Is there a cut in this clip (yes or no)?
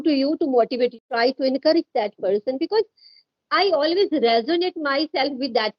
yes